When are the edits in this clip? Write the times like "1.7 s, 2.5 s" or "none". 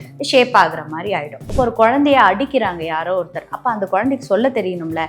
1.4 s